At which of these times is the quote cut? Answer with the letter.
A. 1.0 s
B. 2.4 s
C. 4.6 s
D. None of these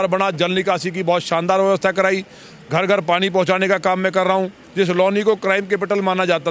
C